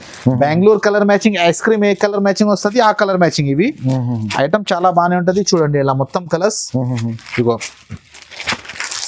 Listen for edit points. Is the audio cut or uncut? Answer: uncut